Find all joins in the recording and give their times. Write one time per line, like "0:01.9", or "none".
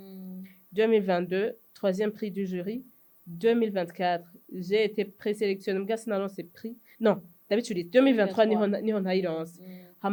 none